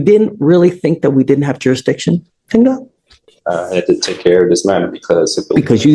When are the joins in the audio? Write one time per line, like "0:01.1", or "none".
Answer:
none

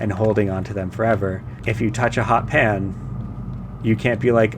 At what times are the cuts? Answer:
0:01.5

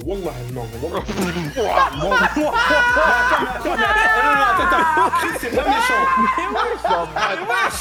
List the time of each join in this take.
none

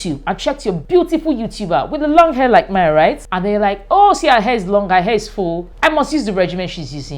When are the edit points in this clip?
0:00.8
0:03.3
0:05.7

